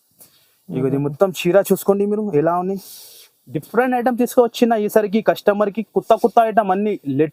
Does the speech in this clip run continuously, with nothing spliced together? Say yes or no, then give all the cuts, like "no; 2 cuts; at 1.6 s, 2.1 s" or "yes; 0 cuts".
yes; 0 cuts